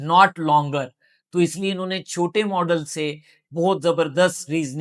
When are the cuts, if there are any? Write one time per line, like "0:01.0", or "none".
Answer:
none